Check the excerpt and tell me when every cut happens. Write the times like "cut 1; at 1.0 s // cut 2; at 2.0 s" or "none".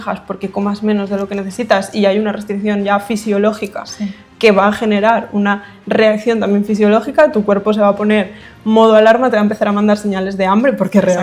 none